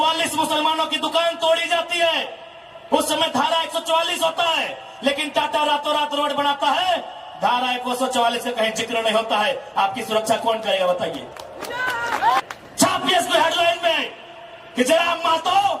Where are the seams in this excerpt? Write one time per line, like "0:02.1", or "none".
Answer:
0:12.4